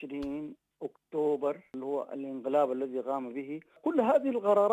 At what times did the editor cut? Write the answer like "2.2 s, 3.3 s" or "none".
1.7 s, 3.8 s